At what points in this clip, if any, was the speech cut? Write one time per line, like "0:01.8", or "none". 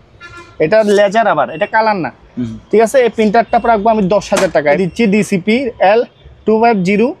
0:04.8